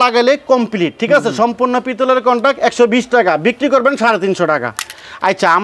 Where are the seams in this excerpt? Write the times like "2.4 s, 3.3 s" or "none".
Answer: none

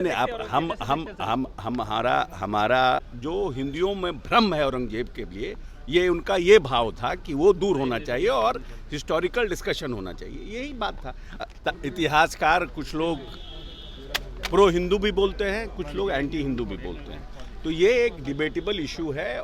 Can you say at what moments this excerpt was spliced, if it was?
3.1 s, 11.4 s

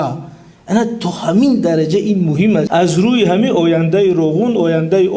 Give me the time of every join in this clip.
2.7 s

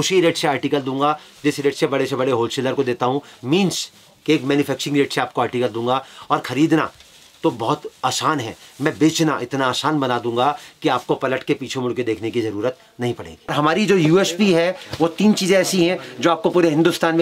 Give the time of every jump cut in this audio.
13.5 s

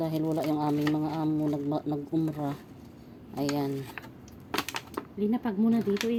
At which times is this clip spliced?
none

